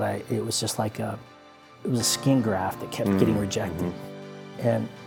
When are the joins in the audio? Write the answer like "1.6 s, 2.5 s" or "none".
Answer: 1.7 s